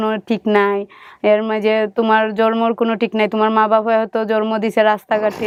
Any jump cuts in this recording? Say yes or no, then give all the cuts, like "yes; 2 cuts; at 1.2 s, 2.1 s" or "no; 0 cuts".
no; 0 cuts